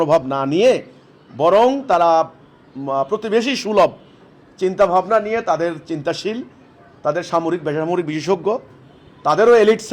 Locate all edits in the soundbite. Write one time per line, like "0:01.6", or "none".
none